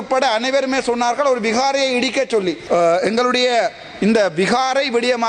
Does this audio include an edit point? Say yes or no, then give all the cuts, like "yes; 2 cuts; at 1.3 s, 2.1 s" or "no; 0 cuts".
yes; 1 cut; at 2.6 s